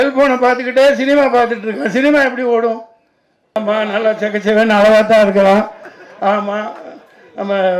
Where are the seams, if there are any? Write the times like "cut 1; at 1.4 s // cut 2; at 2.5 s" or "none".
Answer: cut 1; at 3.6 s